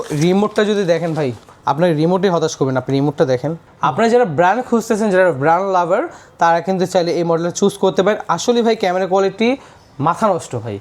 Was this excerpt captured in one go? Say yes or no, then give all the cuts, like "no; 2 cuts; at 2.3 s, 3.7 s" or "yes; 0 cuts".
yes; 0 cuts